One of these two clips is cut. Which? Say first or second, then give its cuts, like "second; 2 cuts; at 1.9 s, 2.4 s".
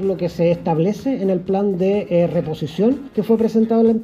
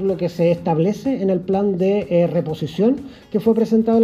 first; 1 cut; at 3.1 s